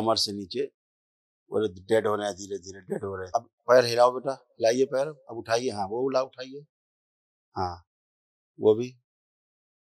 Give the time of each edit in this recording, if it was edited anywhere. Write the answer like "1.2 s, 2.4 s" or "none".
3.2 s

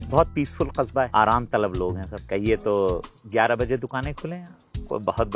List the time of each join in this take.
1.1 s, 2.1 s, 3.2 s

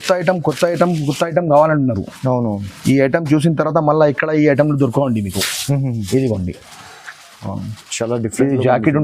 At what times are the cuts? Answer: none

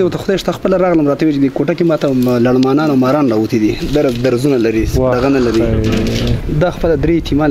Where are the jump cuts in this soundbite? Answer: 6.4 s

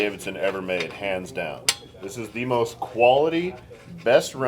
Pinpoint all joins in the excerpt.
none

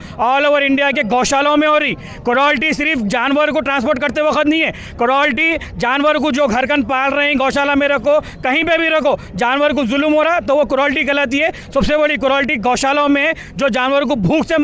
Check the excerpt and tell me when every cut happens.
none

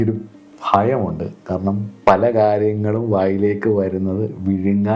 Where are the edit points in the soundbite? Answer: 1.9 s

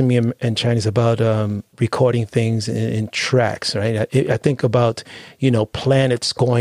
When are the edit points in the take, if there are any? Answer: none

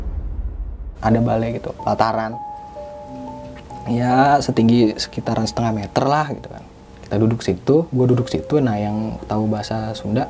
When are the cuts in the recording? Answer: 0.9 s

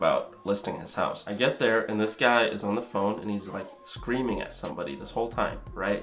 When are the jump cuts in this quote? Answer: 1.2 s

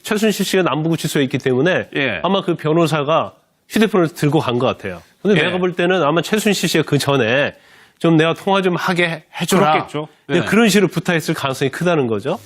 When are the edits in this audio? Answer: none

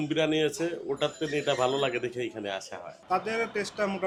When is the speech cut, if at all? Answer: none

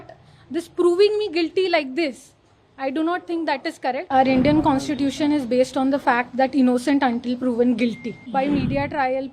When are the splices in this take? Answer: 4.1 s, 8.2 s

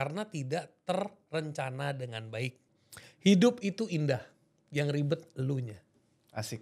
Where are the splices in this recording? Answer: 2.6 s

